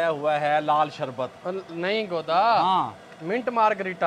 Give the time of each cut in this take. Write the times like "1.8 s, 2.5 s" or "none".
none